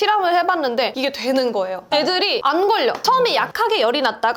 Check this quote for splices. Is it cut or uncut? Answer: cut